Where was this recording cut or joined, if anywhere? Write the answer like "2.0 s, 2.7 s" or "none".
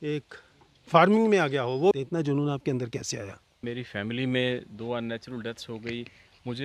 1.9 s, 3.6 s